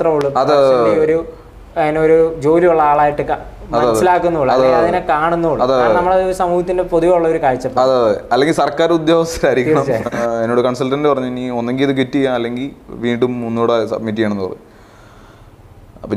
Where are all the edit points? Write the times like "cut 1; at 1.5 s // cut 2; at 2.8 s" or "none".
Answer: cut 1; at 10.2 s